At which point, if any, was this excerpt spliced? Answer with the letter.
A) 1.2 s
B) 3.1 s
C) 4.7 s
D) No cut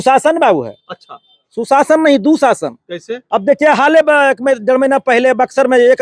B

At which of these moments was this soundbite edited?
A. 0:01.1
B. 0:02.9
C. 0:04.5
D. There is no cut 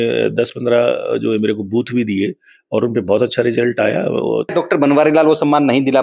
C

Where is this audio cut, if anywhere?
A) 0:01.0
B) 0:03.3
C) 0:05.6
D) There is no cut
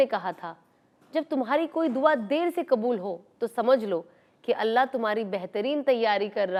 D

